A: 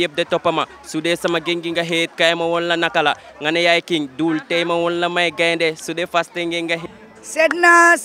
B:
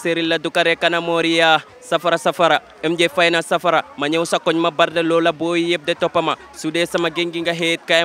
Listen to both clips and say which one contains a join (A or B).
A